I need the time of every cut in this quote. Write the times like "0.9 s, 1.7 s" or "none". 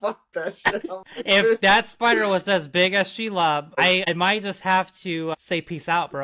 4.1 s, 5.3 s